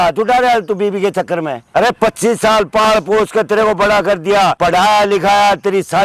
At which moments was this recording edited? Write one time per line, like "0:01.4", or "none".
0:01.6
0:04.6